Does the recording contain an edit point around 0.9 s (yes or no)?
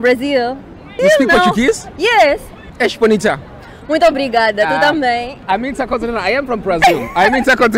yes